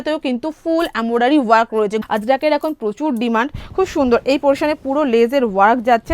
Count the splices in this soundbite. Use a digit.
1